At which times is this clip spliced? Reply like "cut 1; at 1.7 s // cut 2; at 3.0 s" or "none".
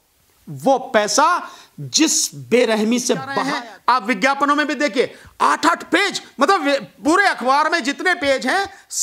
cut 1; at 3.4 s